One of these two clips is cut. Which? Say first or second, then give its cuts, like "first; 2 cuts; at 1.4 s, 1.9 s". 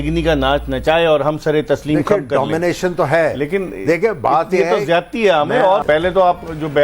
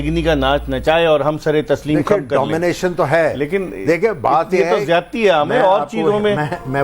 first; 1 cut; at 5.8 s